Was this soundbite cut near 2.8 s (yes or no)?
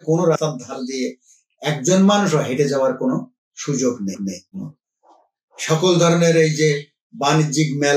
no